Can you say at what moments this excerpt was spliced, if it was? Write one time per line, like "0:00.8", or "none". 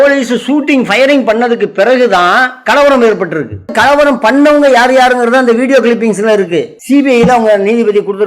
0:03.7
0:06.8